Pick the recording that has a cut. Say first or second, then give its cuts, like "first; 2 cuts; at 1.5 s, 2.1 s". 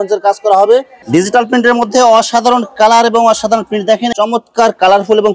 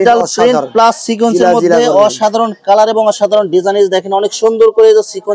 first; 2 cuts; at 1.0 s, 4.1 s